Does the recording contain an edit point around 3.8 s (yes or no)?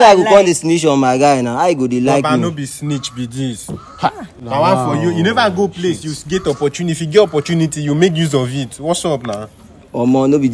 no